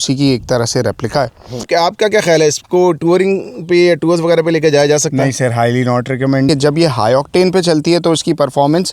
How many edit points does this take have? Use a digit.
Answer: 2